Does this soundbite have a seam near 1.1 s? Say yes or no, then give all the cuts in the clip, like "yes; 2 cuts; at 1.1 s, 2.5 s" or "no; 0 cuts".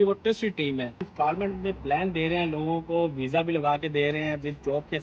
yes; 1 cut; at 1.1 s